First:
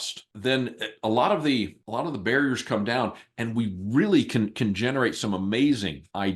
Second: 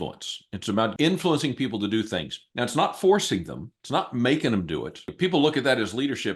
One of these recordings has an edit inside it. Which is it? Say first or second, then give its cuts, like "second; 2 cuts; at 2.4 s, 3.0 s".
second; 1 cut; at 0.9 s